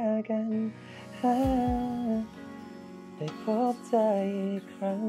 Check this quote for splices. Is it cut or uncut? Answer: uncut